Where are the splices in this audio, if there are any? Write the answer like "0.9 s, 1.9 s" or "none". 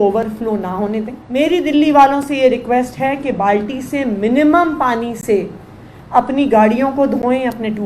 1.2 s

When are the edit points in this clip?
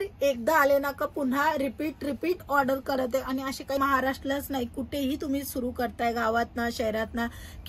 3.8 s

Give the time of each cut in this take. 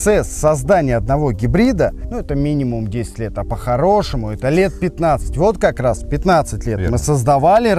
none

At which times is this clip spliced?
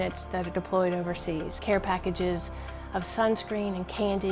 1.6 s

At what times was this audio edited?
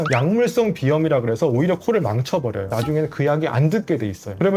2.7 s

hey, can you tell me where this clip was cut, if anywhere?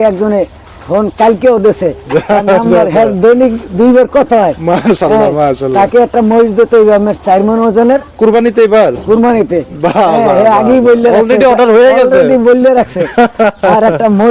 none

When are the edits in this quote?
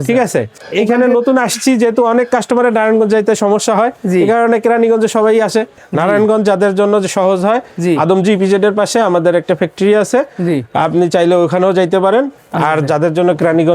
5.8 s, 12.4 s

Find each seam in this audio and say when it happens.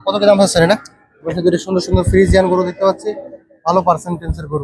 1.3 s

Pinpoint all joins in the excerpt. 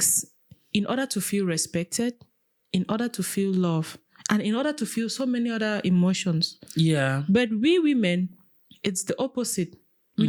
none

